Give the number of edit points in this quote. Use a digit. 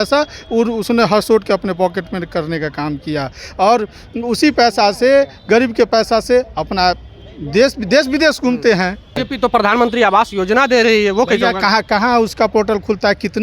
1